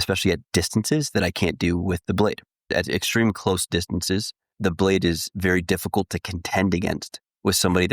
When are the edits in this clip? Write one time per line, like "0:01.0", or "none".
0:02.7
0:04.4